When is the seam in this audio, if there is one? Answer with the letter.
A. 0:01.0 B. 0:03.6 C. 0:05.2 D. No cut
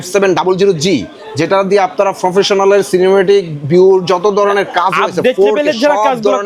D